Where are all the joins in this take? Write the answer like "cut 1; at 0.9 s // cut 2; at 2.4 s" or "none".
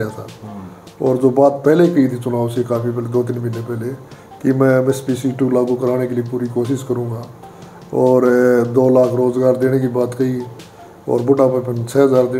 none